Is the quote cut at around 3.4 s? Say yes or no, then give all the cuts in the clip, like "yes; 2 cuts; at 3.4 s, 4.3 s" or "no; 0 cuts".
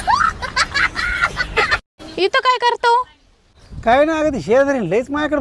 no; 1 cut; at 2.0 s